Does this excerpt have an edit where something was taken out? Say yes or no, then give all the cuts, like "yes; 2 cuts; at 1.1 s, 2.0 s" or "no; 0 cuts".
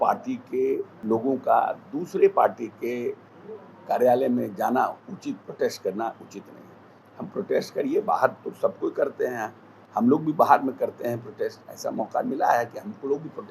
yes; 1 cut; at 0.9 s